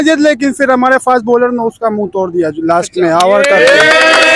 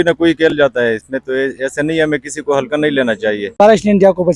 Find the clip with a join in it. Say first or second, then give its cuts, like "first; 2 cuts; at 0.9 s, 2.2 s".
second; 1 cut; at 3.4 s